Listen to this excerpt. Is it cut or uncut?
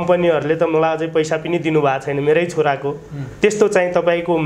uncut